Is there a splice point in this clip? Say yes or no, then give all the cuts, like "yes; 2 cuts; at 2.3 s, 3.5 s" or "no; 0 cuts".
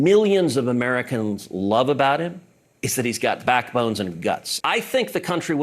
yes; 1 cut; at 4.5 s